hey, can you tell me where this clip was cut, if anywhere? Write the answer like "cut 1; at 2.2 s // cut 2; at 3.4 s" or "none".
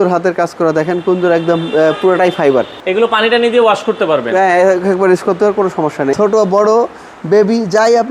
cut 1; at 2.8 s // cut 2; at 6.1 s